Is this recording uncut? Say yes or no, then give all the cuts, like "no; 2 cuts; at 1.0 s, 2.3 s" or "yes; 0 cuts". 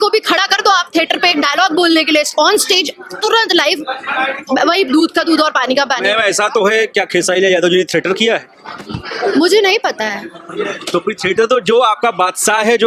yes; 0 cuts